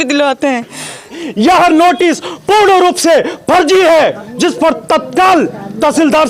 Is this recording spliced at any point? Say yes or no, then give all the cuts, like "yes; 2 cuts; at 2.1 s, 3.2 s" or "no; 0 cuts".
yes; 1 cut; at 1.2 s